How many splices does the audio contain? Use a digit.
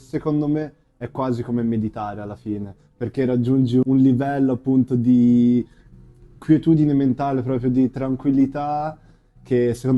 1